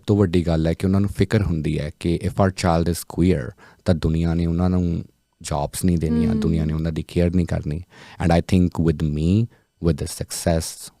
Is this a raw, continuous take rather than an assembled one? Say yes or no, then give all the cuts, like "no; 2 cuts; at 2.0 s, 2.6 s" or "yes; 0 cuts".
yes; 0 cuts